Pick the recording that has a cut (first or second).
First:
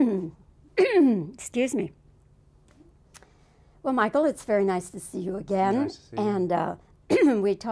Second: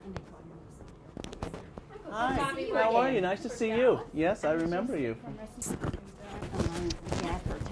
second